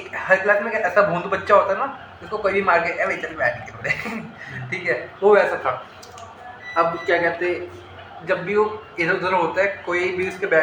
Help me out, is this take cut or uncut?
uncut